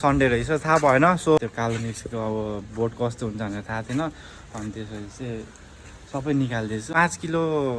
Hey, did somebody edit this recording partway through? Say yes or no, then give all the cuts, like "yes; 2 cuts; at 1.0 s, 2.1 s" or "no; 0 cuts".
yes; 2 cuts; at 1.4 s, 6.9 s